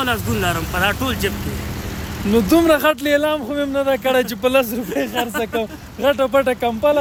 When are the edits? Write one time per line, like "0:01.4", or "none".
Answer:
none